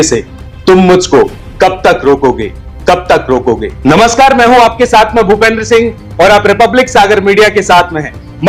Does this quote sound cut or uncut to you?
uncut